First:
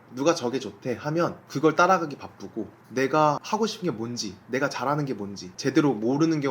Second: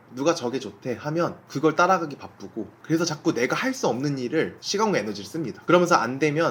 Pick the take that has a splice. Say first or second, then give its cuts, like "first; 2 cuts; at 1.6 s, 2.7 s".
second; 1 cut; at 2.7 s